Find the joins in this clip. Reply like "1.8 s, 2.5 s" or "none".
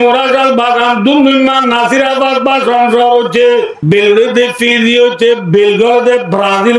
3.8 s